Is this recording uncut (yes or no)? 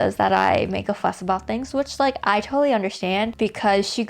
yes